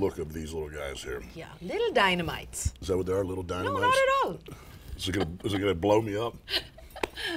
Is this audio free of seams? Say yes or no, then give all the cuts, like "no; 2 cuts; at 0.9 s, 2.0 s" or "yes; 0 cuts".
yes; 0 cuts